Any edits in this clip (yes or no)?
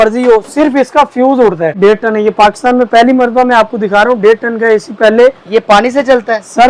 yes